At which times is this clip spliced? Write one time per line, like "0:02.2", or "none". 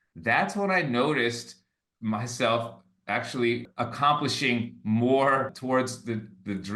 0:03.6
0:05.6